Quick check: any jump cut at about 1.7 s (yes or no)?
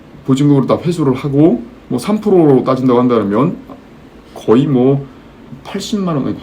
yes